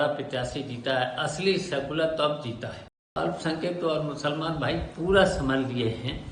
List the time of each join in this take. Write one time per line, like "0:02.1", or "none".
0:03.2